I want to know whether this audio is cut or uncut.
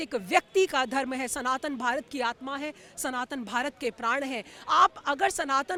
uncut